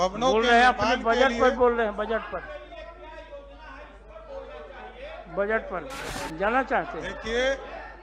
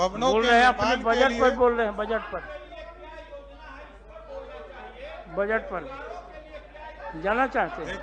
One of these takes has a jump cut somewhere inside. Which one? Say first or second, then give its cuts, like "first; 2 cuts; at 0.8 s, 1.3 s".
first; 1 cut; at 6.0 s